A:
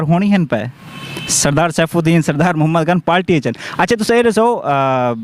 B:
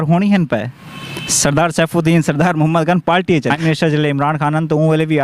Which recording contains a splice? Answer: B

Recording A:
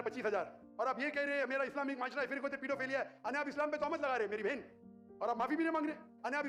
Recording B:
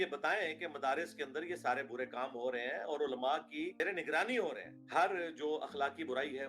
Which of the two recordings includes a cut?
B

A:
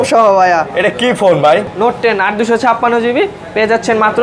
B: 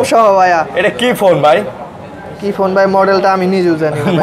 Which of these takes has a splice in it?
A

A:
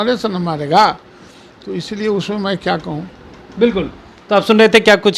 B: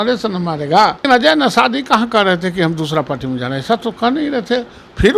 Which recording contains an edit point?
B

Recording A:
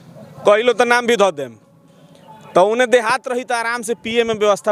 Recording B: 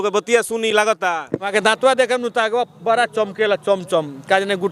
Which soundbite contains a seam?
B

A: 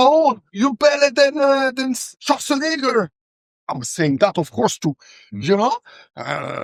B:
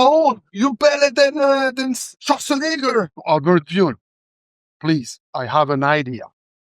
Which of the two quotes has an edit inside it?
B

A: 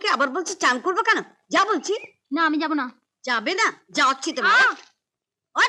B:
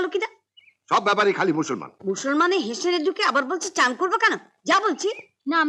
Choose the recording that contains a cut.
B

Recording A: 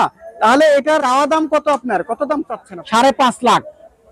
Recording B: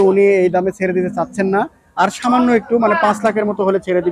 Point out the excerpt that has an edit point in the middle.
A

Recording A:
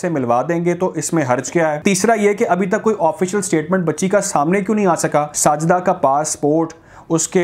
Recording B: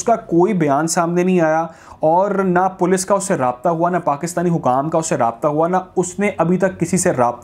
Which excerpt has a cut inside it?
A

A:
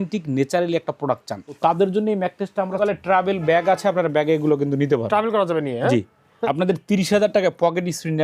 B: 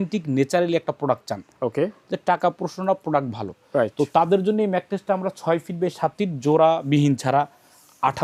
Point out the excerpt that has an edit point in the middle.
A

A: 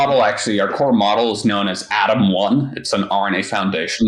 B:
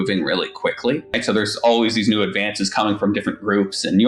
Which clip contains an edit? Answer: B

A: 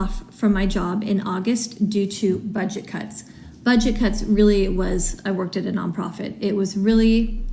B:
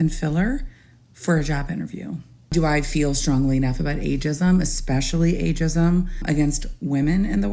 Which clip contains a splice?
B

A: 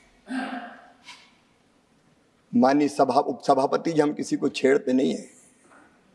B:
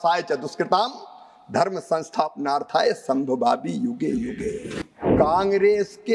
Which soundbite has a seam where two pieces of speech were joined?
B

